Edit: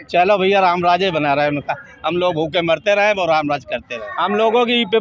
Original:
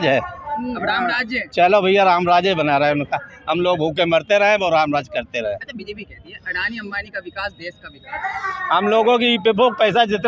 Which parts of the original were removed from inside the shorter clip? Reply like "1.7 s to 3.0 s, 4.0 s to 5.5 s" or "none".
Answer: 5.4 s to 8.5 s

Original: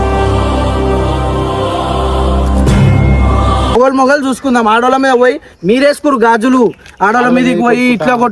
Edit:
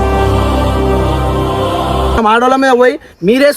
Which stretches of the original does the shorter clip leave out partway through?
2.2 s to 4.6 s

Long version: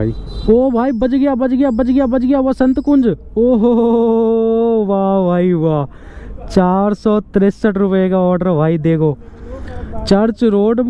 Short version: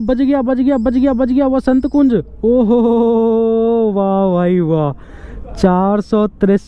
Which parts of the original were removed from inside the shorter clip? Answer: none

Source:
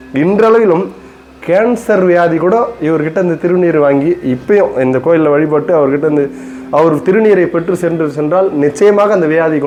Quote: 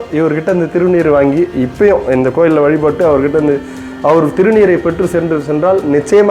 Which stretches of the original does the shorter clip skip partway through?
none

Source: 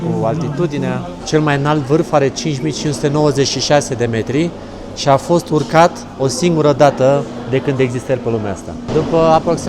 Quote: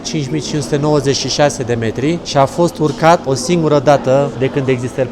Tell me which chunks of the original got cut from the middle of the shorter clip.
4.6 s to 5.0 s, 6.0 s to 6.2 s, 7.3 s to 7.4 s

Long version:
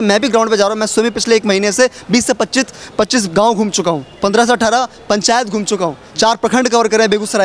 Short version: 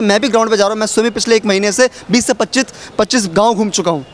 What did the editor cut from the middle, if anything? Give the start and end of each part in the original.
none

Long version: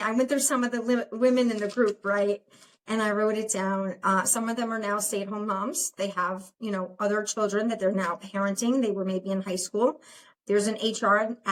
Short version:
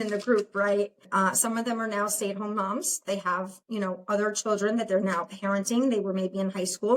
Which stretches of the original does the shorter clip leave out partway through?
2.5 s to 4.0 s

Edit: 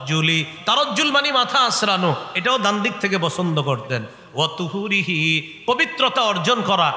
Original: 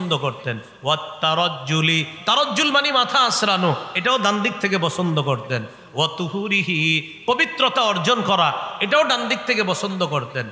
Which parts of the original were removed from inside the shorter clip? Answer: none

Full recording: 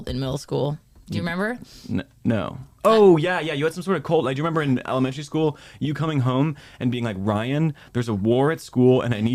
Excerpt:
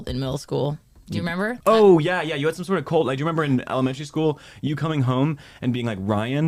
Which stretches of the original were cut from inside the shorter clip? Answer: 1.6 s to 2.8 s

